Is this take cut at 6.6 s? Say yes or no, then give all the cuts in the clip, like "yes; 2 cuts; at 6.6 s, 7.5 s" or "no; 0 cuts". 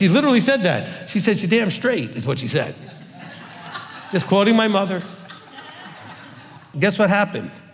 yes; 1 cut; at 6.6 s